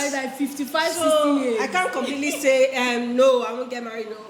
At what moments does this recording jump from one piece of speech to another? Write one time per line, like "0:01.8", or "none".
none